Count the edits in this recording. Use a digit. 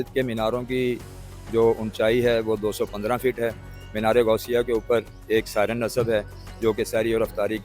0